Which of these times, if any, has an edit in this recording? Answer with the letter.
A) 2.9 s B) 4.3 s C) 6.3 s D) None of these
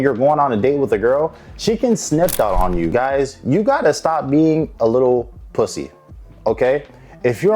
A